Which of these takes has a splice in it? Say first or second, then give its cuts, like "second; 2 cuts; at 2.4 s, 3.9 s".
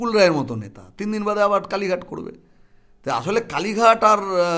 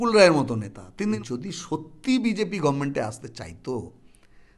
second; 1 cut; at 1.2 s